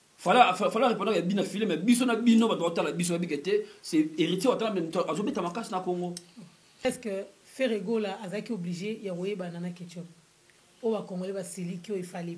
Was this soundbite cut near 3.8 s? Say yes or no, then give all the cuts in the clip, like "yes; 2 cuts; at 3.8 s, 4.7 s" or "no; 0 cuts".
no; 1 cut; at 6.8 s